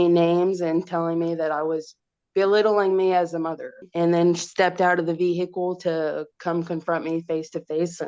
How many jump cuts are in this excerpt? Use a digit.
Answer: 1